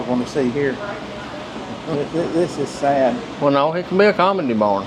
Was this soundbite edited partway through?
no; 0 cuts

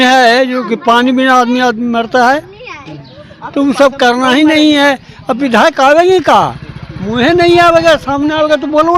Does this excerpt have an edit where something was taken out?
no; 0 cuts

